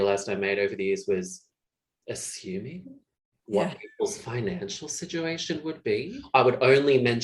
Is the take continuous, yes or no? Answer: no